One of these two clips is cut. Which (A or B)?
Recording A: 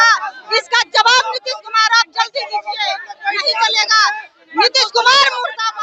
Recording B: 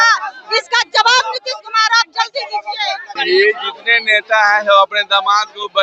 B